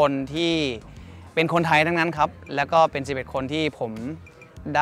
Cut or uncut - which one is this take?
uncut